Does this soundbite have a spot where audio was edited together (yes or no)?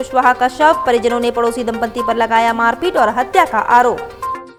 no